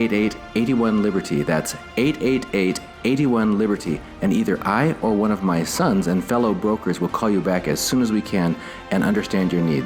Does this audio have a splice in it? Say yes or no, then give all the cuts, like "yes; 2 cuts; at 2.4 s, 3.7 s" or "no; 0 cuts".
no; 0 cuts